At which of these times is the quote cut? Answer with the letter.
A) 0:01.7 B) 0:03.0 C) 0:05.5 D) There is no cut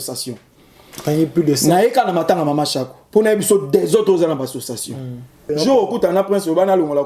C